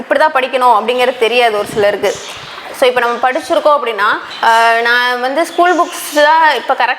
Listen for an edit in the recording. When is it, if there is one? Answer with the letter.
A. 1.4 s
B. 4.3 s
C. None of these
B